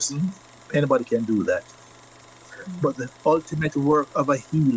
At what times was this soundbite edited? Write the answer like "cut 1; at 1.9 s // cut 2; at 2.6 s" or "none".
none